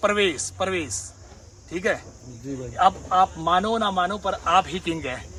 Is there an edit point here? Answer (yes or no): no